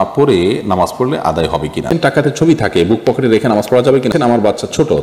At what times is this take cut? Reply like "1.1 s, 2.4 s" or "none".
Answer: 1.9 s, 4.1 s